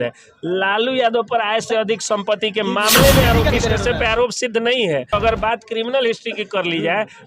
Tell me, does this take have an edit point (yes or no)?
yes